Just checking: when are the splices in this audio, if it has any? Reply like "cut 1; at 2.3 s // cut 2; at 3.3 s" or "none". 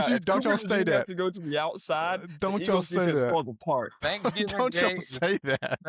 cut 1; at 3.9 s